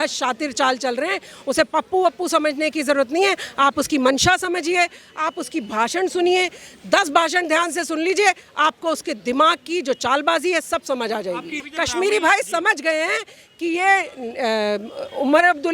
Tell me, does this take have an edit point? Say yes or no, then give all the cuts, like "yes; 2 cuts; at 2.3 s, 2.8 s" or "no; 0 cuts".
yes; 1 cut; at 11.6 s